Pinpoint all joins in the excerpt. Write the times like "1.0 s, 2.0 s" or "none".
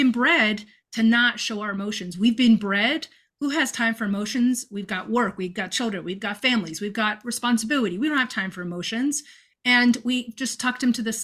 none